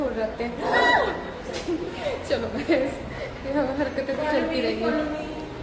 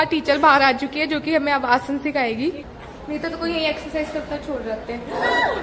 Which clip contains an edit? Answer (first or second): second